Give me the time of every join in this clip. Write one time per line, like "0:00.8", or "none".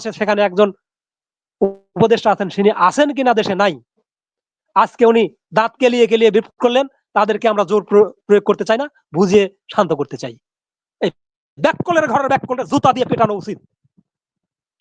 none